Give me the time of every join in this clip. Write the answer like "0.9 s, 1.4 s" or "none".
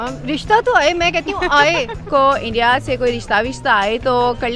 2.0 s